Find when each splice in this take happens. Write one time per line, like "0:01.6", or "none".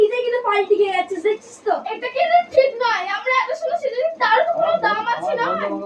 none